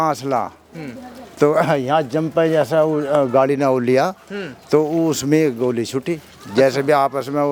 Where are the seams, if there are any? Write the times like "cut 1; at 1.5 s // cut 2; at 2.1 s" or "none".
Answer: none